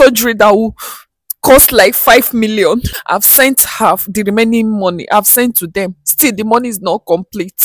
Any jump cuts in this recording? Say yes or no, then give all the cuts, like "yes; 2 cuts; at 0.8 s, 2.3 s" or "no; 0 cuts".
yes; 1 cut; at 2.9 s